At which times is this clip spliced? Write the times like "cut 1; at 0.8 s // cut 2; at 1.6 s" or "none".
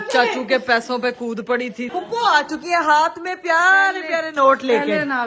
cut 1; at 1.9 s